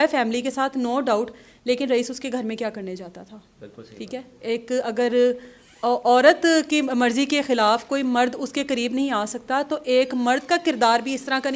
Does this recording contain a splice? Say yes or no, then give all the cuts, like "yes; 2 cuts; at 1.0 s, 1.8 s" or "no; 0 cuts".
no; 0 cuts